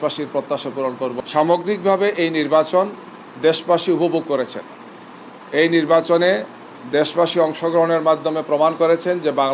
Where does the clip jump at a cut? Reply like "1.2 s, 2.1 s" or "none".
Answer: 1.1 s

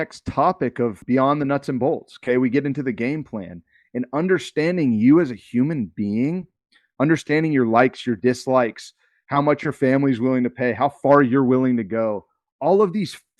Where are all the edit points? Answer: 1.0 s

